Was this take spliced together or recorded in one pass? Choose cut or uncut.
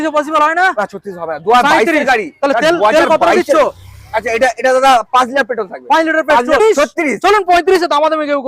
cut